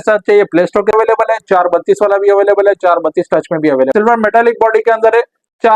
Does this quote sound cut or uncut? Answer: cut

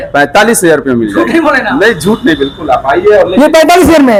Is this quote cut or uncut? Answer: uncut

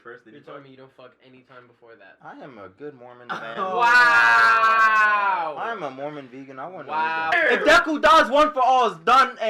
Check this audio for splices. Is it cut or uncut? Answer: cut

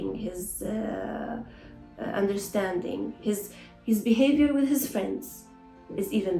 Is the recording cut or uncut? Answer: uncut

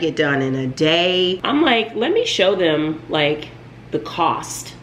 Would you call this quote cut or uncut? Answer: cut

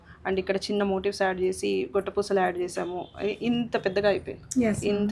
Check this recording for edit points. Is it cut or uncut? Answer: uncut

